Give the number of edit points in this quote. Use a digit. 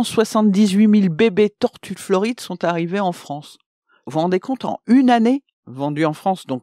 1